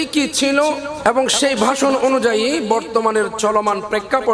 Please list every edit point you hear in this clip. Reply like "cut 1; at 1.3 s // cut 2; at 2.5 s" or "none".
cut 1; at 0.9 s